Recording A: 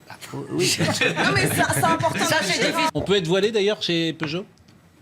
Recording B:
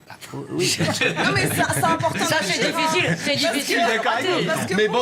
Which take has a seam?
A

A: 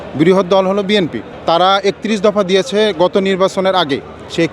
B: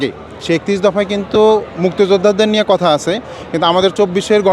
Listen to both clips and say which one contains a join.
A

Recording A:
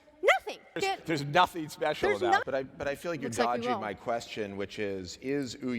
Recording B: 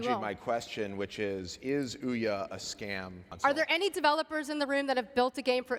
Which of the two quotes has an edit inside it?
A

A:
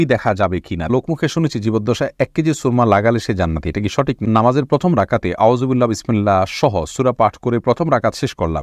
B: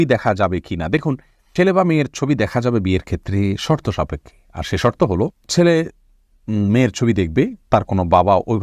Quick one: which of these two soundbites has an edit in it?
A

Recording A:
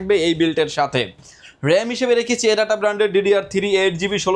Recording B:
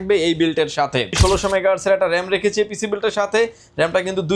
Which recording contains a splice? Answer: B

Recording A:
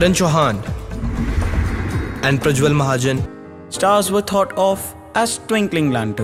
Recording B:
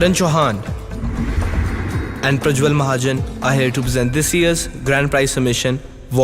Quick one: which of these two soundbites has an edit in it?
B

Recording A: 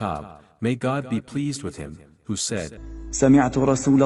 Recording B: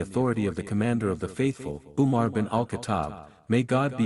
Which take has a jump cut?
A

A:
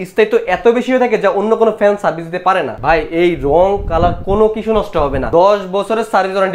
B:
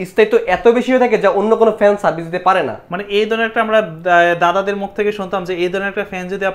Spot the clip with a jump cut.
A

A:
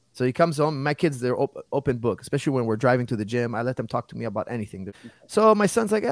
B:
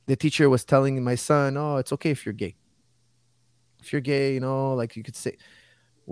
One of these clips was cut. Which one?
A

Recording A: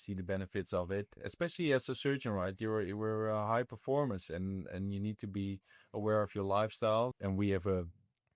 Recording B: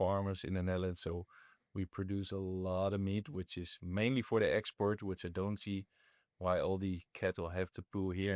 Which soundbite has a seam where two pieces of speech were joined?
A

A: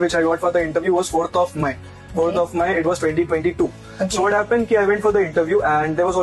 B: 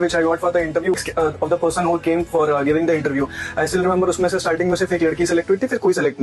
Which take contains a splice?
B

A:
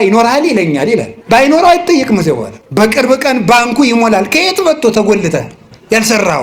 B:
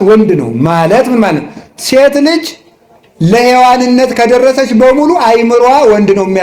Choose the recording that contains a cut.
A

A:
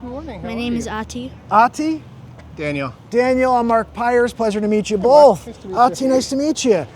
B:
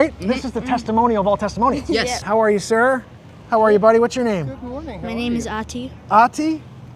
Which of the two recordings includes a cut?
B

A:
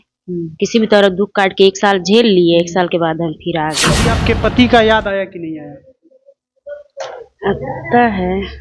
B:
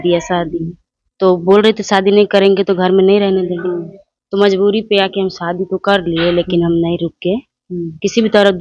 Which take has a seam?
A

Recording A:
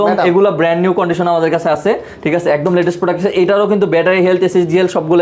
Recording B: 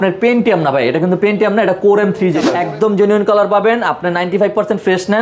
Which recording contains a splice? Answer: B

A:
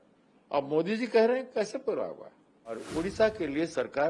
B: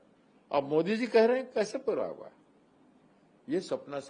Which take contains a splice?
A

